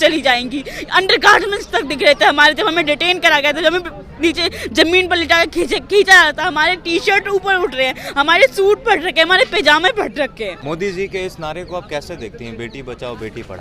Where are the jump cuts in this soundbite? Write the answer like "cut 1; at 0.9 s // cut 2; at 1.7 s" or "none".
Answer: cut 1; at 10.6 s